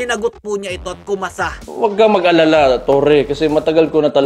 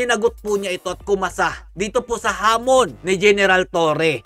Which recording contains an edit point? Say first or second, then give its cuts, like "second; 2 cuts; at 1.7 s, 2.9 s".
first; 1 cut; at 1.6 s